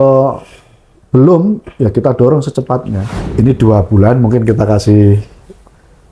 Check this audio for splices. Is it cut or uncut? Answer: cut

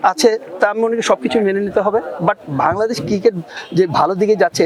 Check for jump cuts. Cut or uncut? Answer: uncut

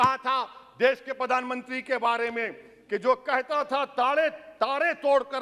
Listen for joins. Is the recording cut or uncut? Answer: uncut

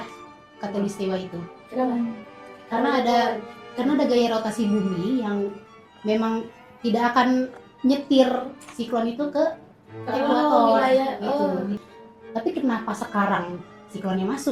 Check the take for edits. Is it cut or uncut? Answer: cut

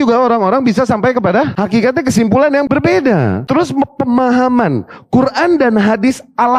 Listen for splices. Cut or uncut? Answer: cut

